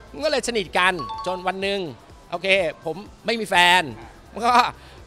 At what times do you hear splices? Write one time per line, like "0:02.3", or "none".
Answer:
0:01.2